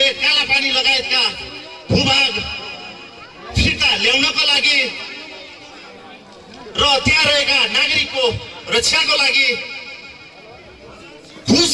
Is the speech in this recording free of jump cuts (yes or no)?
yes